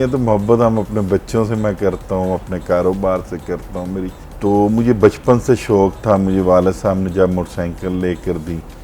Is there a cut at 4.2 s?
yes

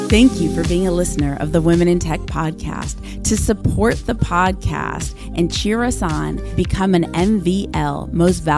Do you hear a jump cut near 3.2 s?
no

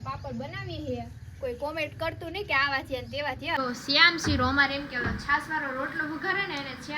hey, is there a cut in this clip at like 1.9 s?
no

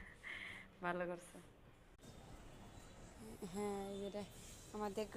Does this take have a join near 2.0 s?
yes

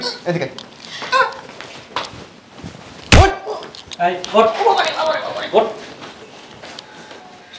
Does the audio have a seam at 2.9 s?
no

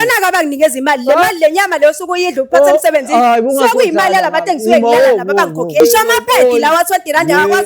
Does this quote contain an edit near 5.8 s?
yes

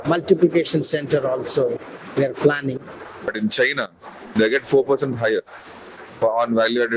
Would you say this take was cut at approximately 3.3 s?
yes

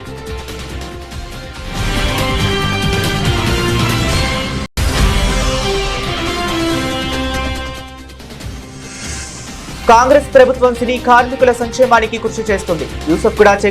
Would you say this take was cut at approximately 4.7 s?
yes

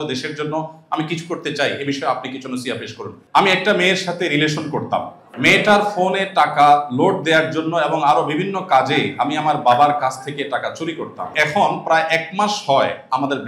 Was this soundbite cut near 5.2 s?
yes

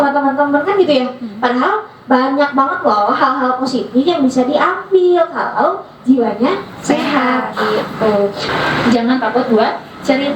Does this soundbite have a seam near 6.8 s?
no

